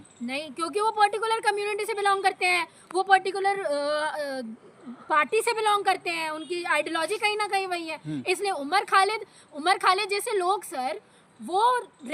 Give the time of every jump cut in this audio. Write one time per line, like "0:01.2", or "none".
none